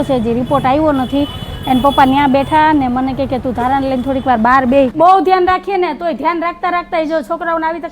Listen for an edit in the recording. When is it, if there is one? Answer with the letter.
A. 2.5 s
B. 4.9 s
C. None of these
B